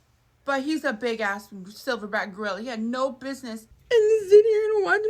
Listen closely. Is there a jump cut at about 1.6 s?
no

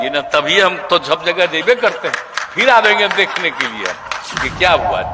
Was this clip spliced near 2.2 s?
no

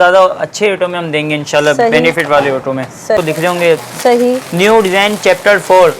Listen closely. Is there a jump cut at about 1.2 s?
no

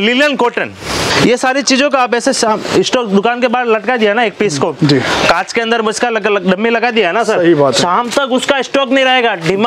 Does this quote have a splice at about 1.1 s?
yes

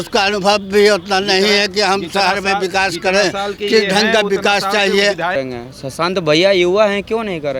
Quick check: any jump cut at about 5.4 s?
yes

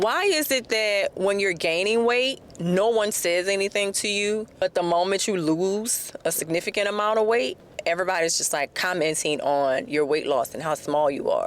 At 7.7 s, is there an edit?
yes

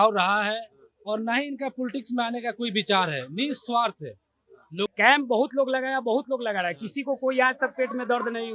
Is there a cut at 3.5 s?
no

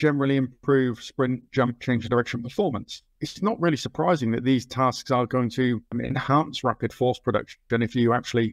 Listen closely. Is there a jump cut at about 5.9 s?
yes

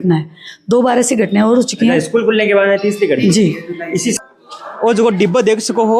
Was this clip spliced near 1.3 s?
no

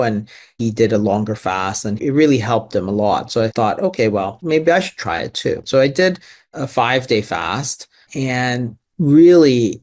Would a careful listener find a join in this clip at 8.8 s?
yes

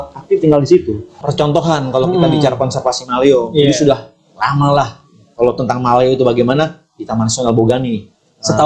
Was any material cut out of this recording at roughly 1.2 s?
yes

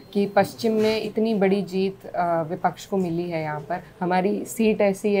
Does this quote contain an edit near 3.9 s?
yes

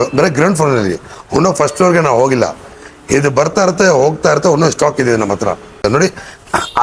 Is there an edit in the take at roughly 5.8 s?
yes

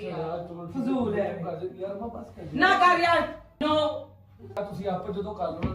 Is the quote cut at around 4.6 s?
yes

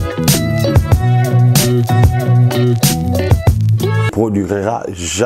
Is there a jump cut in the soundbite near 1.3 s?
no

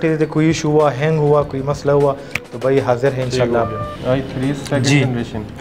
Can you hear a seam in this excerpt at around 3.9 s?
yes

